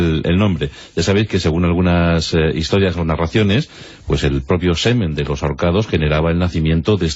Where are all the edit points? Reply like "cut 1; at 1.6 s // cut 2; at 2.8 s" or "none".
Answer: cut 1; at 4.9 s